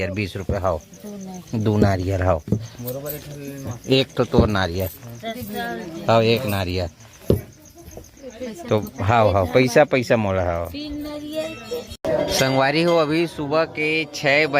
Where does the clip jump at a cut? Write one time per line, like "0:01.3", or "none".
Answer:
0:11.9